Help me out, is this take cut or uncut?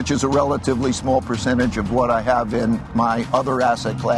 uncut